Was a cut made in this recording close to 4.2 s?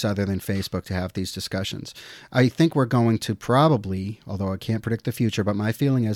no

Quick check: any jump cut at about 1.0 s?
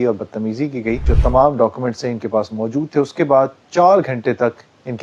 yes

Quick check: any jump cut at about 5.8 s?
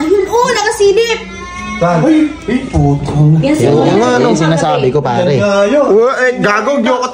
no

